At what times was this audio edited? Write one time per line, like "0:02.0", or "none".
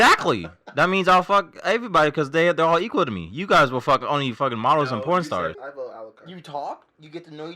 0:05.6